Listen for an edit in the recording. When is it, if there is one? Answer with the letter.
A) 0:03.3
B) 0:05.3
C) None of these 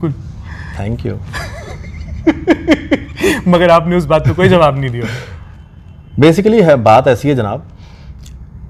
C